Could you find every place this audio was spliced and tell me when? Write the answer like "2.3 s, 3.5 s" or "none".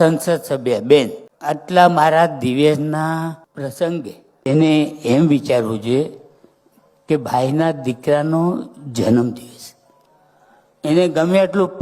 1.3 s, 3.5 s